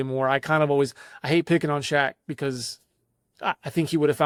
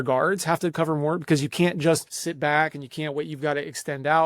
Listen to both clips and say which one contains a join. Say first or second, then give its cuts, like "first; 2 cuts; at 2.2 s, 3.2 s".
second; 1 cut; at 2.2 s